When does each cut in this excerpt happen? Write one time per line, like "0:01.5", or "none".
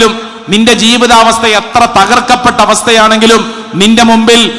none